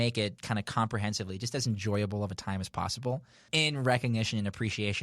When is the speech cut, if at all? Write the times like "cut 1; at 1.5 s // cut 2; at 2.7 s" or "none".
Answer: cut 1; at 3.3 s